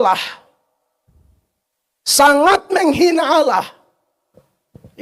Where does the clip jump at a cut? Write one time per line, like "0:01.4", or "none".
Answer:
none